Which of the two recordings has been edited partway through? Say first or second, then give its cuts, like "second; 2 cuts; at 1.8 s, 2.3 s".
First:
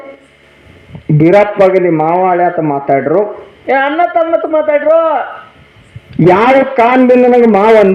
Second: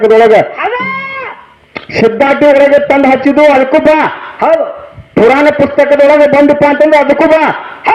second; 1 cut; at 1.1 s